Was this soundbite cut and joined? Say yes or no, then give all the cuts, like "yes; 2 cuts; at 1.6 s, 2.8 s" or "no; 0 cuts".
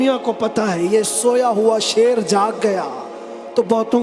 no; 0 cuts